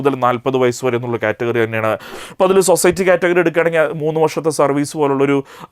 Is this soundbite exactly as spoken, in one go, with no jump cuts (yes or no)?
no